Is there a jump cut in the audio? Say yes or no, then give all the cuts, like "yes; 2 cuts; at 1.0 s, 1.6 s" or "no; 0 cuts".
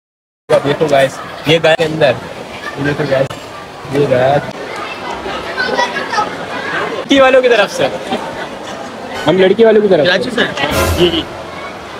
yes; 2 cuts; at 4.5 s, 7.1 s